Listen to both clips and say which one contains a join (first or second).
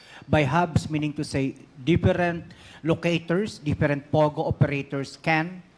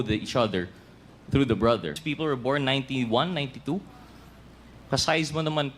second